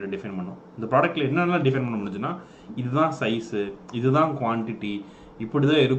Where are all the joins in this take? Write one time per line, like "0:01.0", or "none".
none